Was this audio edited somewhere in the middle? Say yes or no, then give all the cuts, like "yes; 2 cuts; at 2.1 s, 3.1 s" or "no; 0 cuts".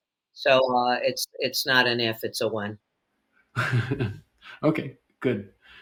no; 0 cuts